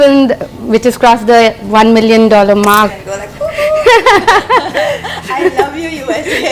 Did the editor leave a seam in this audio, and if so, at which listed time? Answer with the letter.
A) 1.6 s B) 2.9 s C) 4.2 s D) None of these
B